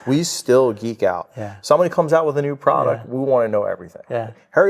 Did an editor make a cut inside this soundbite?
no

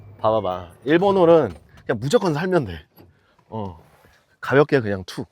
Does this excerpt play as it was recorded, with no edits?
yes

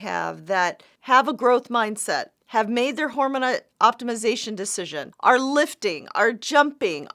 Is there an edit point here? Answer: yes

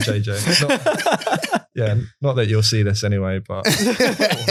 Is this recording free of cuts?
yes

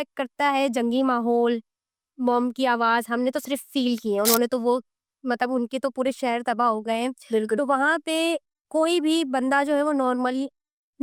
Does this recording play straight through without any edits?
yes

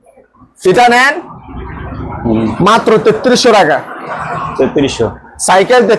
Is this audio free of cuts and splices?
yes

